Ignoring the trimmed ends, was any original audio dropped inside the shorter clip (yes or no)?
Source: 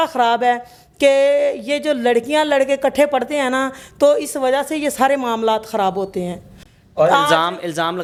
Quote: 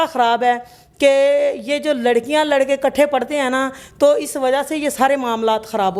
no